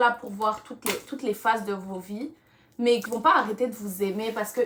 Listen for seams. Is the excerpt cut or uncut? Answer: cut